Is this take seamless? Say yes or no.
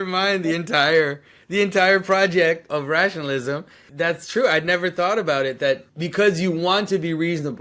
no